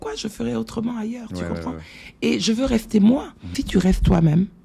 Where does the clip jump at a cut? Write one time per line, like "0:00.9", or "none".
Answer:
0:03.6